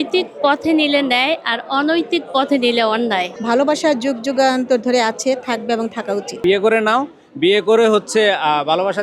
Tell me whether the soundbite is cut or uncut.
cut